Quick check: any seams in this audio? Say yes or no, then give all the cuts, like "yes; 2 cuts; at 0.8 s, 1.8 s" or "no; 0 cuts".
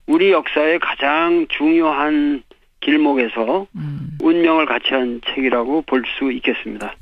yes; 1 cut; at 5.7 s